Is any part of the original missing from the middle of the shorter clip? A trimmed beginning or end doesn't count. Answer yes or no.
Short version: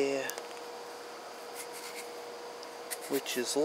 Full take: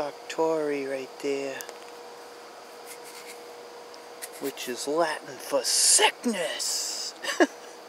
no